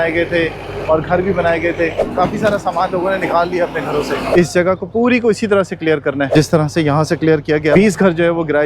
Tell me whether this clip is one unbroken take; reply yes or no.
no